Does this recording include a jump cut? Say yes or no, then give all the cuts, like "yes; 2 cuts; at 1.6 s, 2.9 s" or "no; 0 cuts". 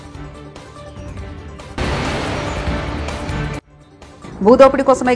no; 0 cuts